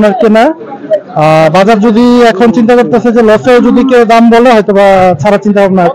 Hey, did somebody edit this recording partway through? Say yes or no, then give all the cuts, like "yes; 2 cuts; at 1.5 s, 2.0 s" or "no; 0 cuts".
no; 0 cuts